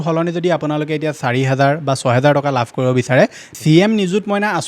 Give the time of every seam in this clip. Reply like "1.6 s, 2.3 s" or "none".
3.4 s